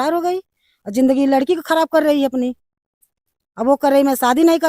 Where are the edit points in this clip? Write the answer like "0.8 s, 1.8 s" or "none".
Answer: none